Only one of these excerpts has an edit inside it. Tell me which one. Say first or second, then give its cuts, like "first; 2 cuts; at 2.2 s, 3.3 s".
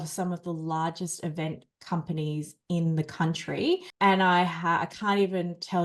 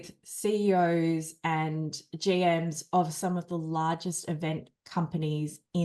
first; 1 cut; at 3.9 s